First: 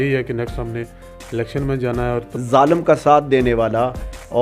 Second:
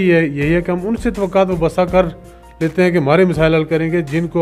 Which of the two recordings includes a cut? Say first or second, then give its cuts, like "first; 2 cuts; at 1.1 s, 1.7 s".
first; 1 cut; at 2.3 s